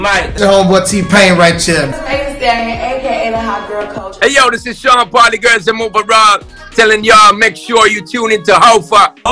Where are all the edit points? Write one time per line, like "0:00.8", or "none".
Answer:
none